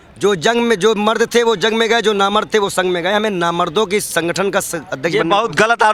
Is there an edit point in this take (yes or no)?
no